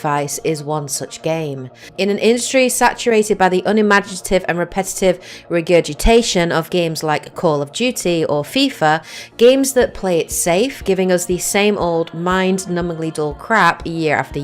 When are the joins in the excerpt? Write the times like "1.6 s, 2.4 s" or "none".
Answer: 10.0 s